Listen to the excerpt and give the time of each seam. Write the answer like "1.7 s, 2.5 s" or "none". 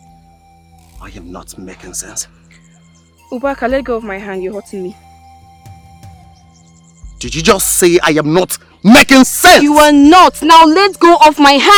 none